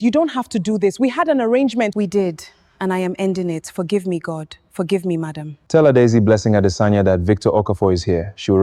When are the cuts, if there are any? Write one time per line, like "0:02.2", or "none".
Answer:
0:01.9
0:05.5